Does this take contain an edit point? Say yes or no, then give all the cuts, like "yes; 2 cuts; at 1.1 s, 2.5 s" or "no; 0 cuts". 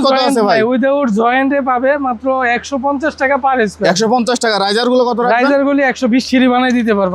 yes; 1 cut; at 6.3 s